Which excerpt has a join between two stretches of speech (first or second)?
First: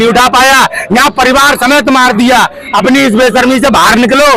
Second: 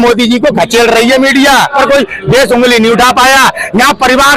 second